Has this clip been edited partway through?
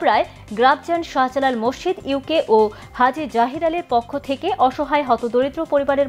no; 0 cuts

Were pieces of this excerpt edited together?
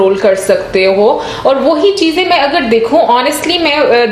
no; 0 cuts

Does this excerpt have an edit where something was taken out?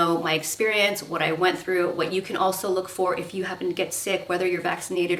no; 0 cuts

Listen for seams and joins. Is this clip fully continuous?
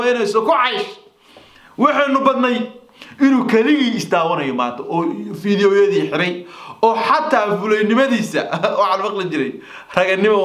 yes; 0 cuts

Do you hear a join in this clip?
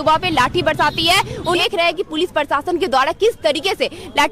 yes; 1 cut; at 1.6 s

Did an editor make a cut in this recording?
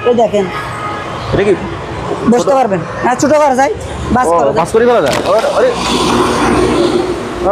no; 0 cuts

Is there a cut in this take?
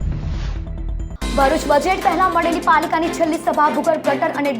yes; 1 cut; at 1.1 s

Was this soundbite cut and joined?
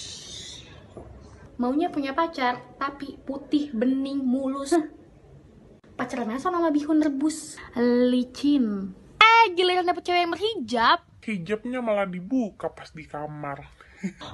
no; 0 cuts

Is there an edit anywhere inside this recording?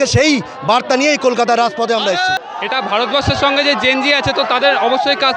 no; 0 cuts

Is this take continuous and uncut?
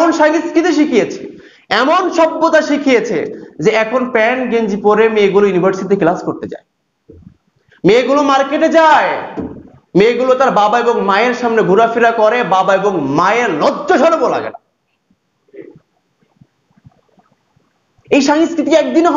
yes; 0 cuts

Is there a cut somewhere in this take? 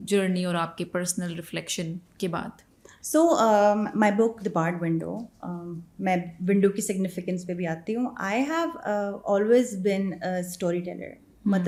no; 0 cuts

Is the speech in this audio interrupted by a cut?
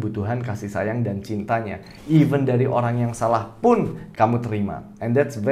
yes; 1 cut; at 4.0 s

